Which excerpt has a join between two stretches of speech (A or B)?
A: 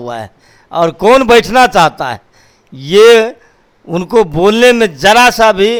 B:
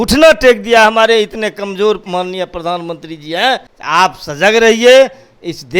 B